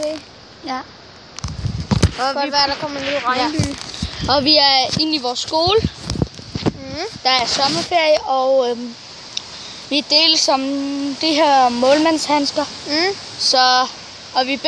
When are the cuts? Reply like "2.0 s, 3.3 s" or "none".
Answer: 6.9 s

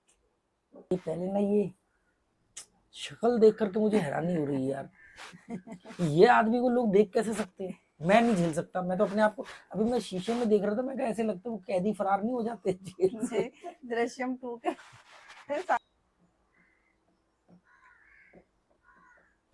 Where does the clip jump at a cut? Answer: 0.9 s, 15.8 s

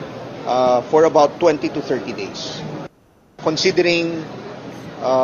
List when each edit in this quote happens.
none

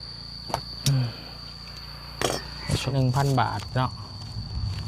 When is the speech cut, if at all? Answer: 2.9 s

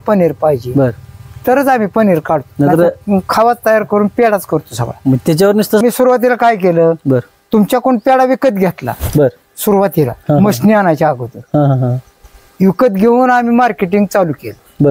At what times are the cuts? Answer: 5.8 s

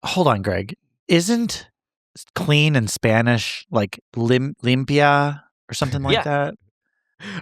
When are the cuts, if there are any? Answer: none

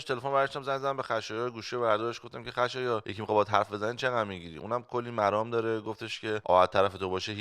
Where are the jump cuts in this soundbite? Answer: 3.1 s, 6.4 s

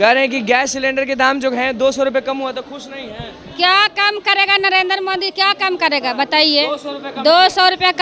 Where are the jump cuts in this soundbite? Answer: none

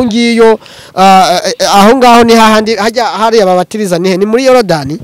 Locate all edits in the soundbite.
none

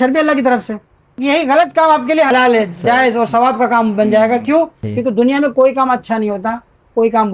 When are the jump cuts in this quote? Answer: 1.2 s, 2.3 s, 4.8 s

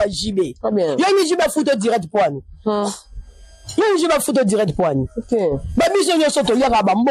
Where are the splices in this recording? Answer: none

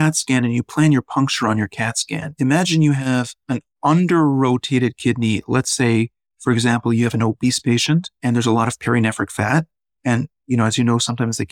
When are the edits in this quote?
3.4 s, 8.1 s

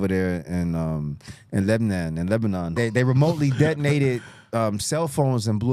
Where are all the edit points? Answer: 2.7 s

